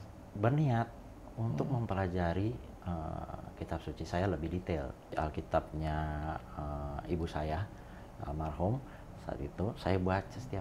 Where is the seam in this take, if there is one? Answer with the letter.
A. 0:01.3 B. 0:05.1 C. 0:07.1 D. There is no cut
B